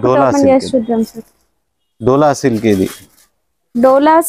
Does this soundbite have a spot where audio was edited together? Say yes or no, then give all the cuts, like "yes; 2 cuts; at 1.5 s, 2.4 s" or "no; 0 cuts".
no; 0 cuts